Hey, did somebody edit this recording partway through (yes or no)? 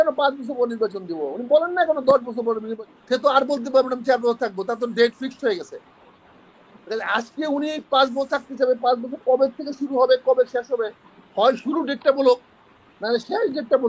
yes